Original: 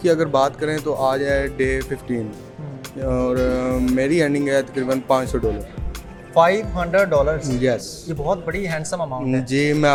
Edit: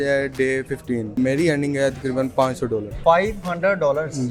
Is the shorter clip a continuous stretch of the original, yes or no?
no